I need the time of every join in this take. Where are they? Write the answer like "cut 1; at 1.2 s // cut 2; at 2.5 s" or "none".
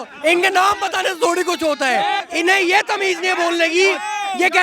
cut 1; at 2.3 s